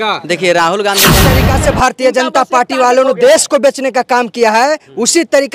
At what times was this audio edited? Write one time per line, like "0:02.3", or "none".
0:01.4